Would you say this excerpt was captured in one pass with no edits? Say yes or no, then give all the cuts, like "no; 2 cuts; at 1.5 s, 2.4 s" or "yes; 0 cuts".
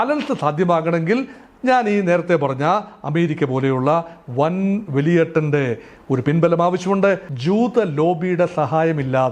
no; 1 cut; at 7.3 s